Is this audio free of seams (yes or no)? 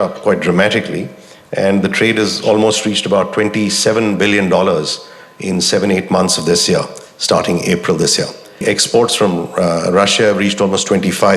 no